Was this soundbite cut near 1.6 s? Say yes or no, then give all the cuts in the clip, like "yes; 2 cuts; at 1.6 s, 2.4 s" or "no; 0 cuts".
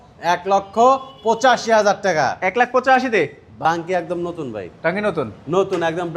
no; 1 cut; at 3.4 s